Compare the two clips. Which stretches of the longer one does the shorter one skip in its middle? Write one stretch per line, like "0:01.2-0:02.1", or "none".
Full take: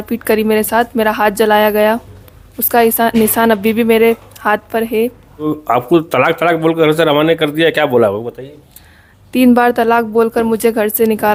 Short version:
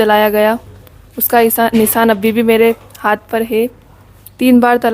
0:05.3-0:08.8